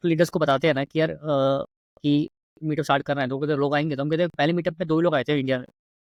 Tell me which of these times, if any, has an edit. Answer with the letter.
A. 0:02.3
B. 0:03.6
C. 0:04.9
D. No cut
D